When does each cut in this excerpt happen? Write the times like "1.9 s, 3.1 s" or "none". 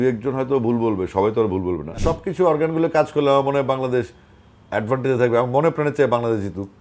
1.9 s